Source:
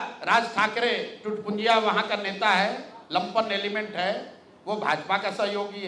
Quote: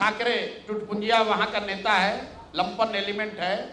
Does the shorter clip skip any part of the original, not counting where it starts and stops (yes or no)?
no